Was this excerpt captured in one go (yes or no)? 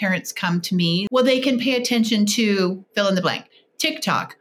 no